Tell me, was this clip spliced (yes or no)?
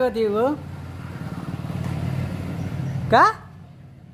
no